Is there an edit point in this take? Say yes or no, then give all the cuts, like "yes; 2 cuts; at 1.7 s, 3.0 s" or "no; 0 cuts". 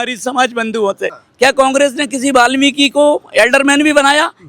yes; 1 cut; at 1.1 s